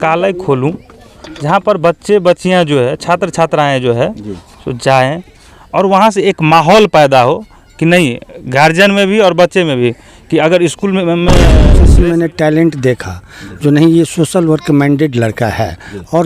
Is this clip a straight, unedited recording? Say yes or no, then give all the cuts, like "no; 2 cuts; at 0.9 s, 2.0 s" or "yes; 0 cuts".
no; 1 cut; at 11.6 s